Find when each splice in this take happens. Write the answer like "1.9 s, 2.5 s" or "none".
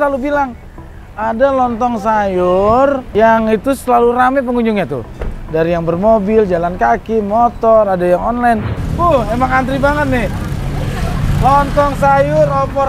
3.0 s, 8.8 s